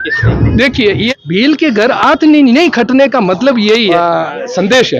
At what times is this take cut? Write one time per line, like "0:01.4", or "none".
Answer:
0:01.1
0:03.9